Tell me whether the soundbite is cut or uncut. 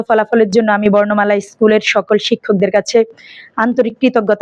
uncut